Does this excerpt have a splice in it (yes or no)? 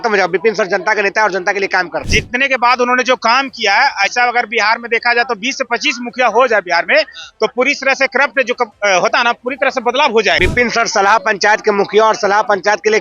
yes